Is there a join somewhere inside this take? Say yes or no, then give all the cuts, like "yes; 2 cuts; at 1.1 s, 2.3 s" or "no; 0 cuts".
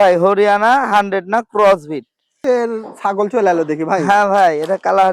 yes; 1 cut; at 2.4 s